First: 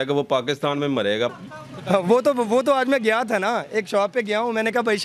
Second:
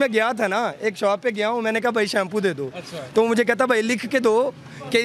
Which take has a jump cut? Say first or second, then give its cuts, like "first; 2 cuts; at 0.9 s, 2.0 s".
first; 1 cut; at 1.3 s